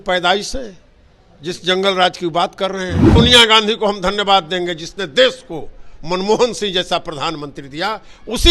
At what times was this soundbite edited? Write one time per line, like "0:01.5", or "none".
0:03.1